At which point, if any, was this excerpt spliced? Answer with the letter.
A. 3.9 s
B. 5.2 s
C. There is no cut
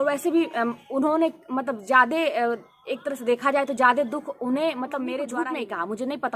B